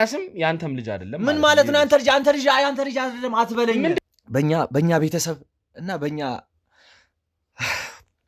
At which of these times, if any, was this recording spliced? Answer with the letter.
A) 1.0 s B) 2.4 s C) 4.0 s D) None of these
C